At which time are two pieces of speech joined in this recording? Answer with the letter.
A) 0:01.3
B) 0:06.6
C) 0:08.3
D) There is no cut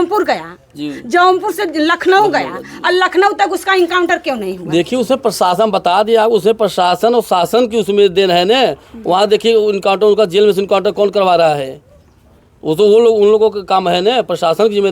D